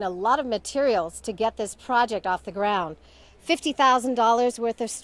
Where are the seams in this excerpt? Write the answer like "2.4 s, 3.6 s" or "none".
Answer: none